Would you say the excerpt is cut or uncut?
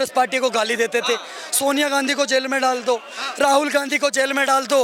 uncut